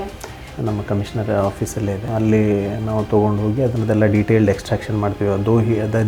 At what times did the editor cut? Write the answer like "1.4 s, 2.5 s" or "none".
2.1 s